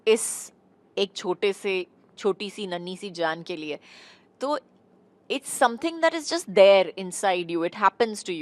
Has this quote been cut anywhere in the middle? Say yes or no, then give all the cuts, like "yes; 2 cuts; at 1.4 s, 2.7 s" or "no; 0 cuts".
no; 0 cuts